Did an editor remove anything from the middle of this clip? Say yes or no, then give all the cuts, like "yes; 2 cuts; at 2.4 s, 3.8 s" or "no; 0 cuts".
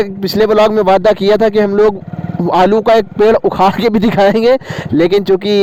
no; 0 cuts